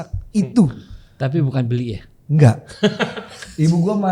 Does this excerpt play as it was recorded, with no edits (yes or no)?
yes